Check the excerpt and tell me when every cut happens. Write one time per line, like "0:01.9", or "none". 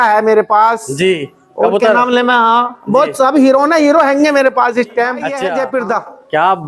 0:05.3

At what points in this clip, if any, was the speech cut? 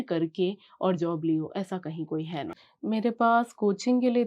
0:02.3

